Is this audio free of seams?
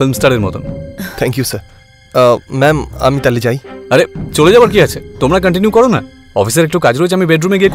yes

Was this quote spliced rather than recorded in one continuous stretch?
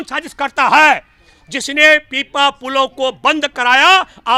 no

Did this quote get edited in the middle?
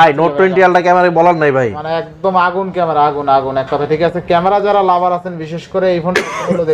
no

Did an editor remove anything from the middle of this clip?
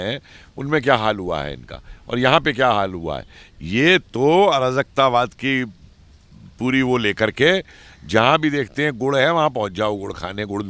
no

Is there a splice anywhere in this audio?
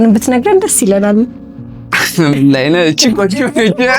no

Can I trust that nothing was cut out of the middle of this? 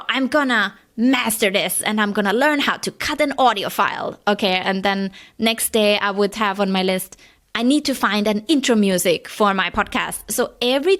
yes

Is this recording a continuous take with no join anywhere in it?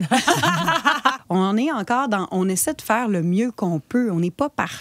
no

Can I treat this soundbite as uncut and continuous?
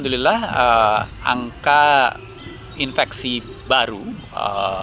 yes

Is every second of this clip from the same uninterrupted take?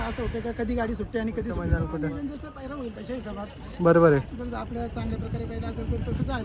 no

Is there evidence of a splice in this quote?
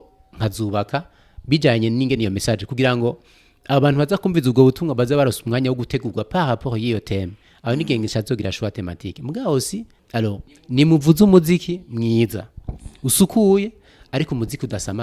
yes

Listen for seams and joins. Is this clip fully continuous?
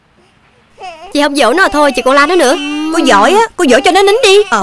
no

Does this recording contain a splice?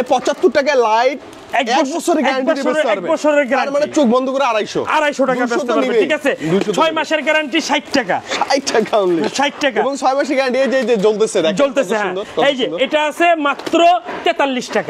no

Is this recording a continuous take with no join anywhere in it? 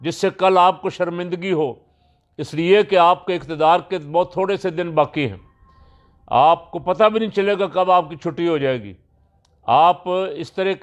yes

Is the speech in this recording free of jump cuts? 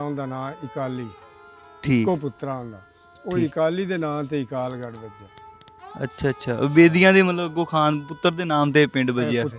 yes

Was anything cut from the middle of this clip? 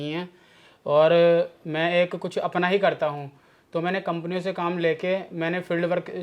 no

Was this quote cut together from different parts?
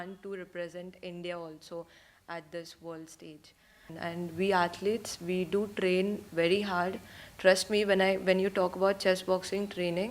yes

